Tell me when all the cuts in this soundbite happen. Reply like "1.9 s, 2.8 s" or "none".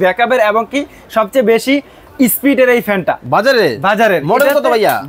none